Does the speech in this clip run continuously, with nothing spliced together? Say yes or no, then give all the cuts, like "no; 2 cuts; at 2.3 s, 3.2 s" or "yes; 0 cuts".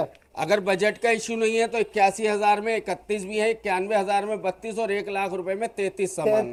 yes; 0 cuts